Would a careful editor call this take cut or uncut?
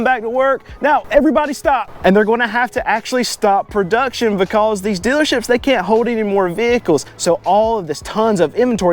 cut